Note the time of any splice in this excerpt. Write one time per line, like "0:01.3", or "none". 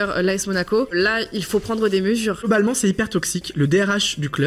0:00.9
0:02.5